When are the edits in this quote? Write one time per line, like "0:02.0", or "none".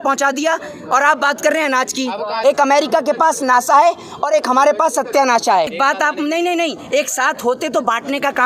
0:02.3
0:05.7